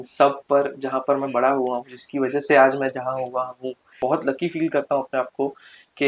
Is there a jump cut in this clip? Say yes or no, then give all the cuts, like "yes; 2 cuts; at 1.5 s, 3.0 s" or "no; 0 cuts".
yes; 1 cut; at 3.9 s